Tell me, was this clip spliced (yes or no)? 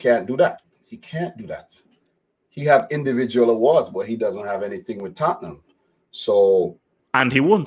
no